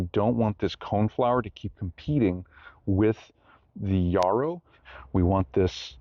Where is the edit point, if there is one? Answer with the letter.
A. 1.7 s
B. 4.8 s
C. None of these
B